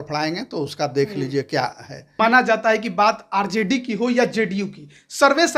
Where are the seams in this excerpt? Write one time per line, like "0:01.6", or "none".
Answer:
0:02.2